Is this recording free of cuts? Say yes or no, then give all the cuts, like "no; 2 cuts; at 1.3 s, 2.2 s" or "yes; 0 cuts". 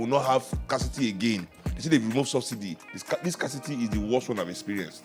yes; 0 cuts